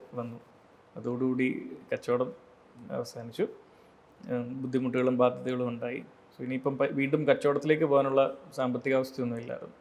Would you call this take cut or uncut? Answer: uncut